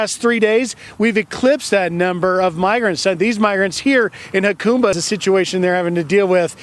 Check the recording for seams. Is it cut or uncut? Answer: cut